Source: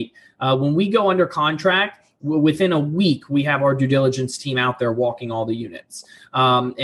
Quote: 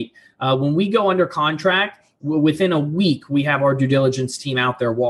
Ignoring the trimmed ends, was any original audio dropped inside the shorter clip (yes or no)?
no